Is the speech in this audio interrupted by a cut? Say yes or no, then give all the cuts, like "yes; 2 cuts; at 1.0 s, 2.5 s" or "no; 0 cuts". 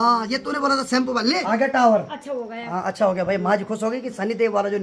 yes; 1 cut; at 1.4 s